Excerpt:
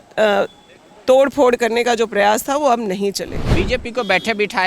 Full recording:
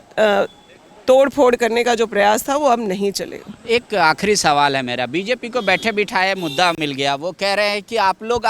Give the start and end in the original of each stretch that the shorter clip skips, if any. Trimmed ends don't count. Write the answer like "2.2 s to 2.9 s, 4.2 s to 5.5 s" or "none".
3.5 s to 5.1 s